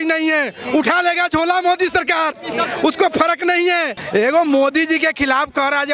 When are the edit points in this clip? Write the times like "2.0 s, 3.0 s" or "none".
4.0 s